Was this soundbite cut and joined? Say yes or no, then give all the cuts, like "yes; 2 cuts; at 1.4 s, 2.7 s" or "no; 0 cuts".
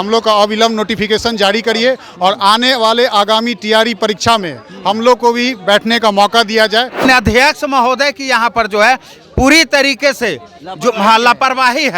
yes; 1 cut; at 7.0 s